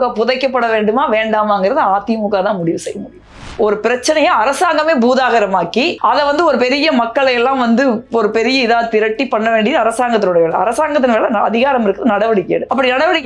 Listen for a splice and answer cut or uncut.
cut